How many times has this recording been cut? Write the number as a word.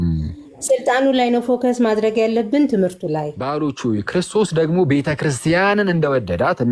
one